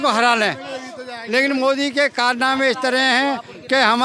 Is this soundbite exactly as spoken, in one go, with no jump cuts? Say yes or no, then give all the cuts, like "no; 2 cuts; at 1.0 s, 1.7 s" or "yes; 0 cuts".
yes; 0 cuts